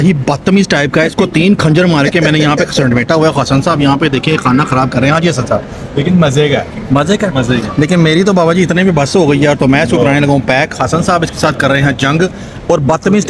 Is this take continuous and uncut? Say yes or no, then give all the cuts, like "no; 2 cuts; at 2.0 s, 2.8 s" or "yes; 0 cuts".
yes; 0 cuts